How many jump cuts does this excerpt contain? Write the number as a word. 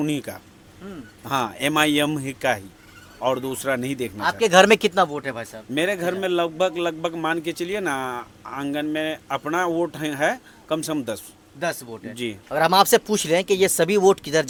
zero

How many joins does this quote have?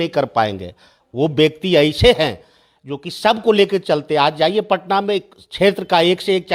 zero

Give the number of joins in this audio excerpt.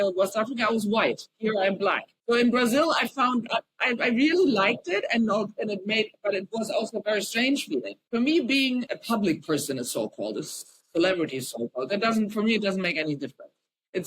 four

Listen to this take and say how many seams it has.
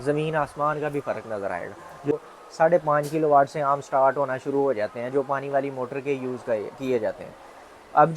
one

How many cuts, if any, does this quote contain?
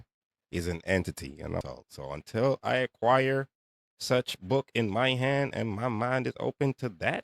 one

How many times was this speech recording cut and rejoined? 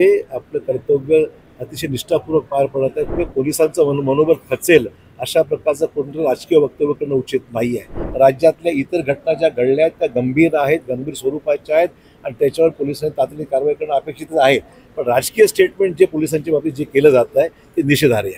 two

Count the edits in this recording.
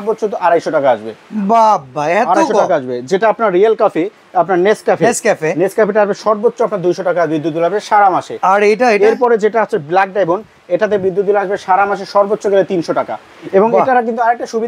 zero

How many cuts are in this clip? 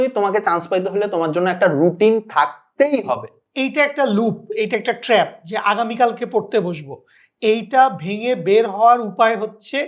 one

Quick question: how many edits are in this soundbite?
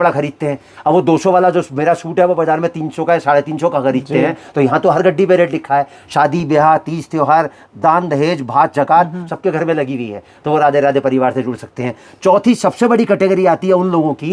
zero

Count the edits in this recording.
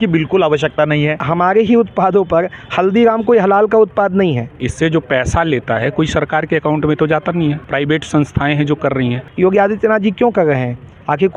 four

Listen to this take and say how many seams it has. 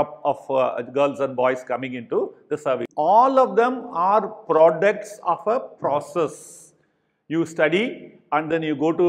one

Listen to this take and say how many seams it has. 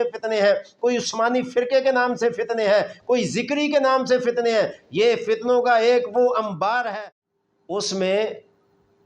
one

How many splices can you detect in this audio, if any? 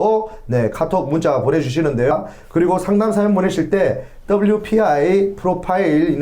one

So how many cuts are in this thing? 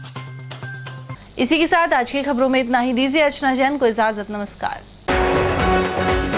zero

